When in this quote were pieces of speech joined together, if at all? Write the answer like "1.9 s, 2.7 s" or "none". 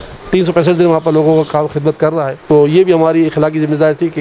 2.3 s